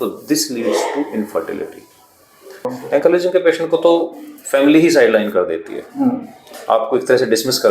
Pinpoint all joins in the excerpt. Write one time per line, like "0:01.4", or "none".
0:02.7

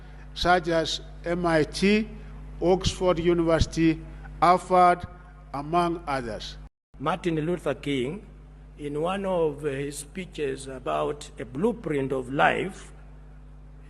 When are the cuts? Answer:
0:06.7

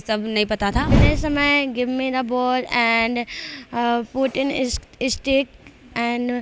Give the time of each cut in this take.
0:00.9

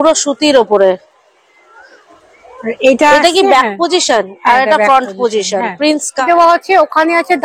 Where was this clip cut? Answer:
0:06.2

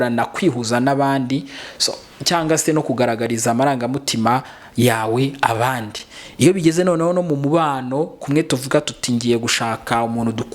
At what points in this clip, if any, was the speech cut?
none

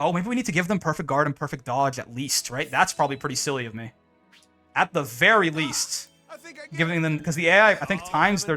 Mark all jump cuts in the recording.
none

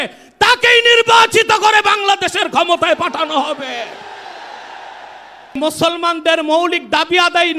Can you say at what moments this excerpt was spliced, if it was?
0:05.5

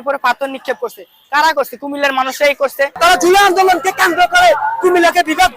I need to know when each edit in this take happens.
0:02.9

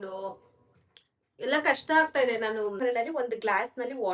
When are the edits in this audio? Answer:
0:02.8

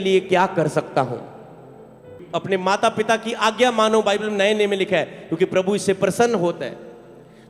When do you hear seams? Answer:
0:02.2

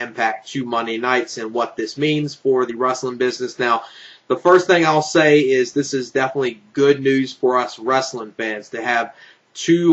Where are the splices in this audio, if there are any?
0:07.5

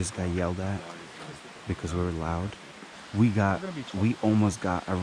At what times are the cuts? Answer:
0:03.0

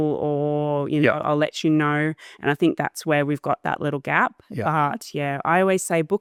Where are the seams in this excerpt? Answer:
none

